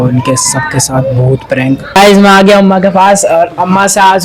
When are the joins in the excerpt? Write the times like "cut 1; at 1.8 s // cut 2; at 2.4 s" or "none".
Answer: cut 1; at 2.0 s